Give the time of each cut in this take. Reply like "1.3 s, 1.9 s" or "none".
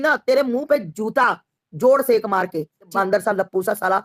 2.9 s